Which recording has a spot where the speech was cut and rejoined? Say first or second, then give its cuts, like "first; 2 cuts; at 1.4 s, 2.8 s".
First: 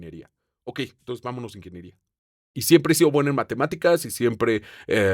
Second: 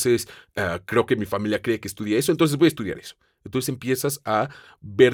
first; 1 cut; at 2.4 s